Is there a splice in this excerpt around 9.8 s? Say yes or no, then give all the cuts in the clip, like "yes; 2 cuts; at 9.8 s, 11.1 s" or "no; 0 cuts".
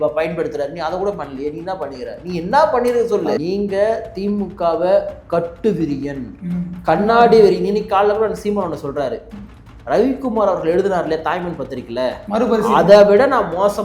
no; 1 cut; at 3.4 s